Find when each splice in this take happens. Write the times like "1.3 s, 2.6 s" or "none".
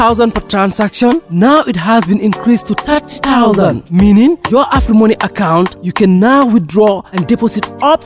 none